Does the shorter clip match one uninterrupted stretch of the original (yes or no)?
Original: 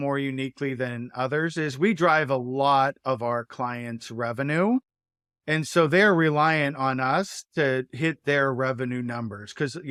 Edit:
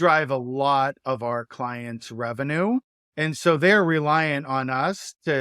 no